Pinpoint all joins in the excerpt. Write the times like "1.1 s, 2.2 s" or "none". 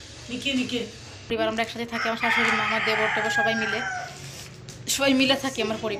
1.3 s

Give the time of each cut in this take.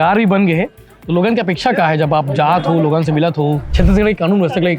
3.7 s

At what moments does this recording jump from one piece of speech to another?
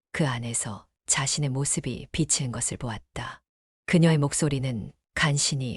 3.8 s

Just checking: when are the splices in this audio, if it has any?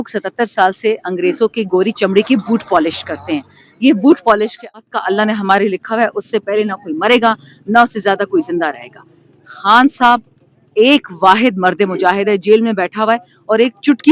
4.8 s

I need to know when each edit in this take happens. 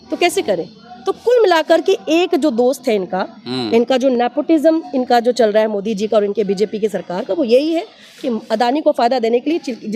none

